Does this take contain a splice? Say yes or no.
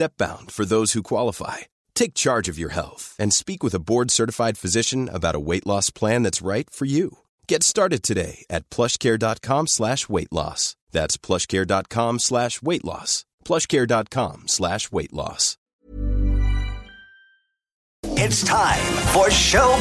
yes